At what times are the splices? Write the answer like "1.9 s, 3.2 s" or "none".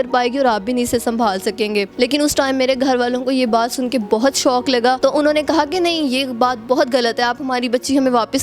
1.9 s, 5.0 s

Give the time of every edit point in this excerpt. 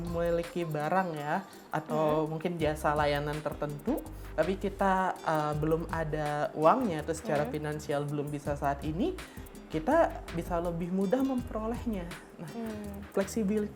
none

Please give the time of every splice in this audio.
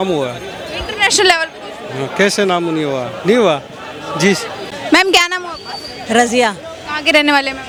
none

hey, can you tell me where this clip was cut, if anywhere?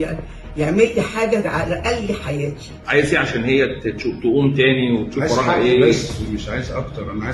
none

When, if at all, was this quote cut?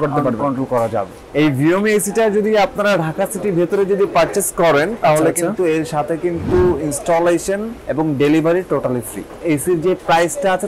1.2 s, 7.8 s, 9.3 s

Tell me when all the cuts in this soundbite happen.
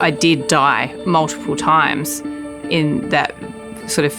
0.9 s

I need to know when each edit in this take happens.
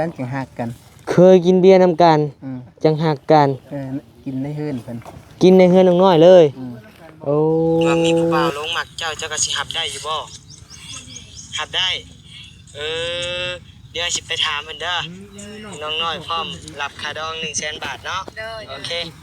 8.5 s

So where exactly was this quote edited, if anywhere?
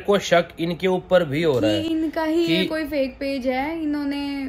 none

